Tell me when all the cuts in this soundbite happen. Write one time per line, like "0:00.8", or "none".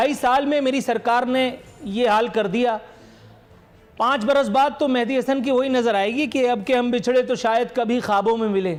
none